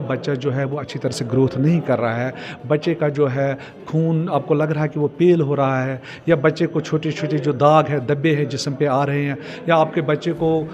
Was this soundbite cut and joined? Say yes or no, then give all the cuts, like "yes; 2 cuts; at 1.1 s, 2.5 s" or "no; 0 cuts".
no; 0 cuts